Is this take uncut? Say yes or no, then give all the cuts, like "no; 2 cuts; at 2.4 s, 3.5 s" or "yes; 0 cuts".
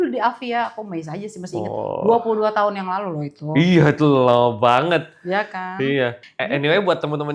no; 1 cut; at 6.2 s